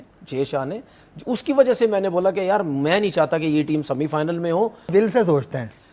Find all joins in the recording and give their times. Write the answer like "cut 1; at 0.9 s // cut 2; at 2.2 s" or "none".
cut 1; at 4.9 s